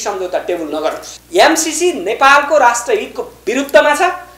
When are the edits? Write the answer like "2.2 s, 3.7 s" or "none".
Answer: 1.1 s